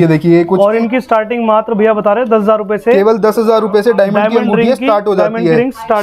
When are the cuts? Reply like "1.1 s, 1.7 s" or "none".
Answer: none